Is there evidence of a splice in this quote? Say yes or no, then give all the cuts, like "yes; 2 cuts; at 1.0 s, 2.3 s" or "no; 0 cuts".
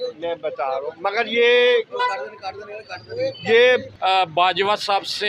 yes; 1 cut; at 3.9 s